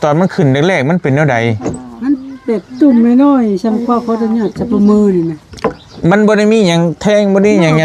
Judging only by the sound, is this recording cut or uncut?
uncut